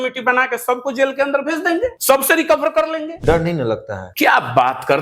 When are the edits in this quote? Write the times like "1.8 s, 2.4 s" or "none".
2.0 s, 3.2 s, 4.0 s

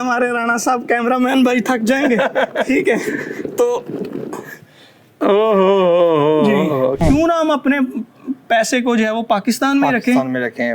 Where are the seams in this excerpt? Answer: 7.0 s

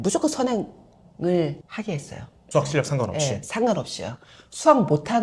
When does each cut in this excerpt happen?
none

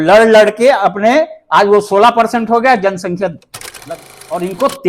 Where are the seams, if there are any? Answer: 3.7 s

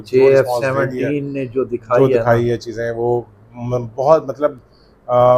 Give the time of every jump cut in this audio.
none

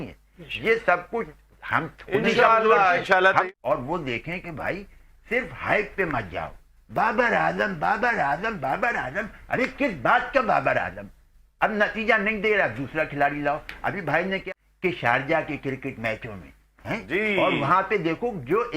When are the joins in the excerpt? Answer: 3.4 s, 14.4 s

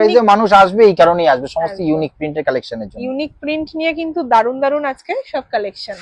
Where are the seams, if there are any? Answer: none

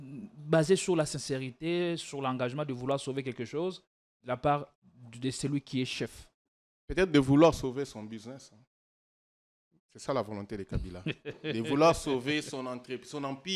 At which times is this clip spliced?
none

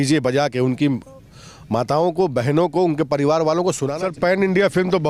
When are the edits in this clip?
3.9 s

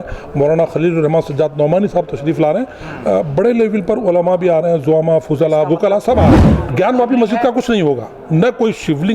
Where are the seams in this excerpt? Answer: 6.6 s

